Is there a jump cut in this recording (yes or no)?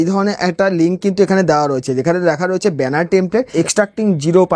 yes